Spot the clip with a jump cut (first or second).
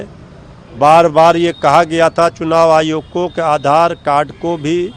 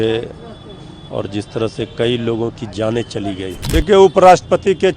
second